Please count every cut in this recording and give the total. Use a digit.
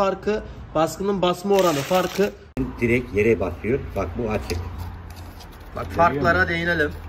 1